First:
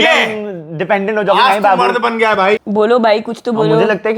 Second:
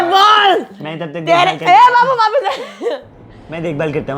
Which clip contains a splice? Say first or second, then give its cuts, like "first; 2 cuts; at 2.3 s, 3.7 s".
first; 1 cut; at 2.6 s